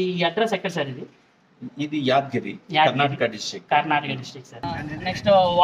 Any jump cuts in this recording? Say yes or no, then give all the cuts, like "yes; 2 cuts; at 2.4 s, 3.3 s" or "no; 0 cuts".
yes; 1 cut; at 4.6 s